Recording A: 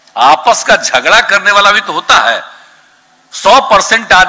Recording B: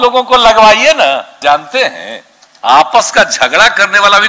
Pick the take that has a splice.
B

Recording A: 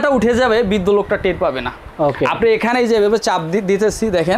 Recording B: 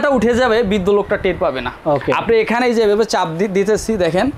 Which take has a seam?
B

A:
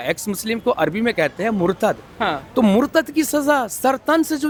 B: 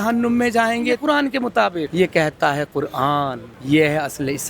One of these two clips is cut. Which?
B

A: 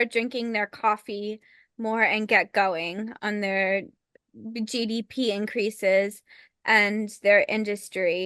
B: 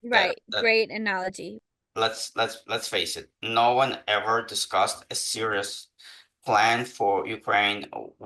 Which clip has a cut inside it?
B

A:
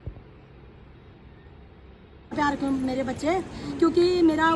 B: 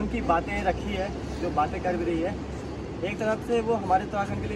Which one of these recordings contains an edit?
A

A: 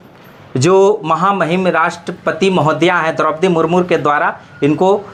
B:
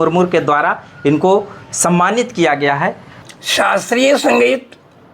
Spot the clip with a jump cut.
B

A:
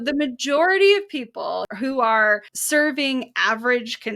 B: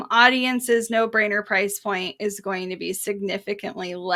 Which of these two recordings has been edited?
A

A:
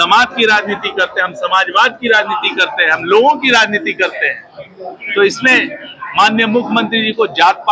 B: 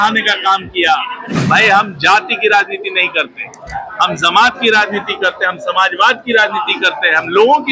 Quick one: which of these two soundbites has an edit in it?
B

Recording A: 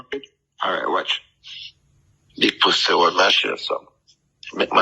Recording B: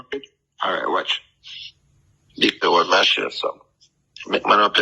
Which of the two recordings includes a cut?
B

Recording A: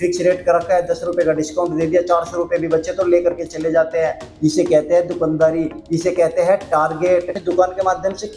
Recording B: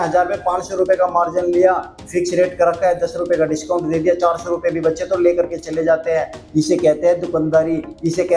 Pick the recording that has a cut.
A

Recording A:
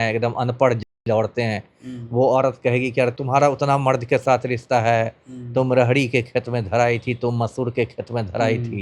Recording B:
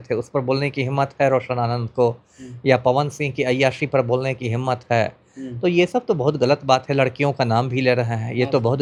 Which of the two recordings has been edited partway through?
A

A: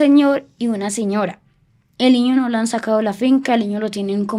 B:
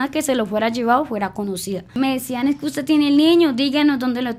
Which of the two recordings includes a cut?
B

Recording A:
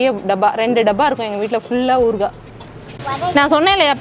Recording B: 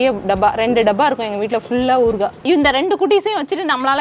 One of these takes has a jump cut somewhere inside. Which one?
B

